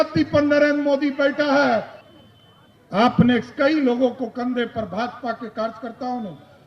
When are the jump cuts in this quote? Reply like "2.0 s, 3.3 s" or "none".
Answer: 2.0 s